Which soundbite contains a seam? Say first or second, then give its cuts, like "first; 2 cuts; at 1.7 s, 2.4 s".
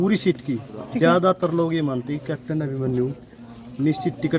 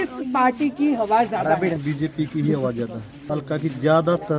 second; 2 cuts; at 1.8 s, 3.1 s